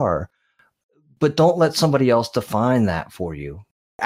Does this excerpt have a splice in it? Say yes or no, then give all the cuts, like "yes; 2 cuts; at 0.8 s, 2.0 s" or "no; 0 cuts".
no; 0 cuts